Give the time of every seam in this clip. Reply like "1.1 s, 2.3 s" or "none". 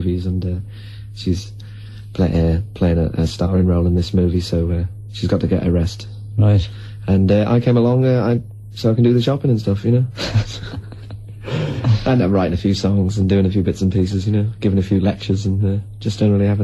13.0 s